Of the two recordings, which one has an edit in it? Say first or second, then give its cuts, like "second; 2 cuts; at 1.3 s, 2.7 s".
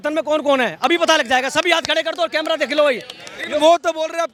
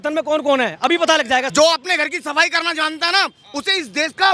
second; 1 cut; at 1.5 s